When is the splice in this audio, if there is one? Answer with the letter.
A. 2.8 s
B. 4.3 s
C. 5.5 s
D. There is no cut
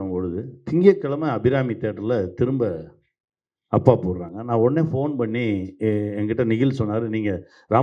D